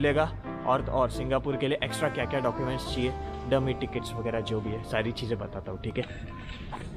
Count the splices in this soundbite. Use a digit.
0